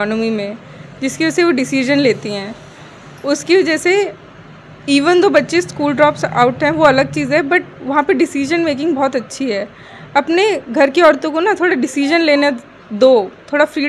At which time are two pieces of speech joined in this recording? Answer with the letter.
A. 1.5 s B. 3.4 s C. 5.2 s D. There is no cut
D